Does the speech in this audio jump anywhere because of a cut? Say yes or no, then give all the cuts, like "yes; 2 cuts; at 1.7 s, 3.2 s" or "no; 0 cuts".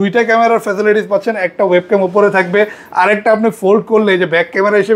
no; 0 cuts